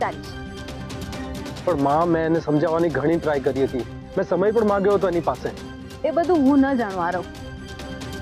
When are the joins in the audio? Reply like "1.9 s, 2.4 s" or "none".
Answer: 7.3 s